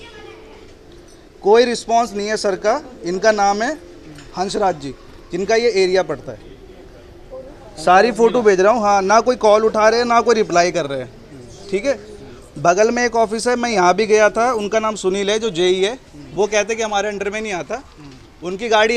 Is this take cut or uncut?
uncut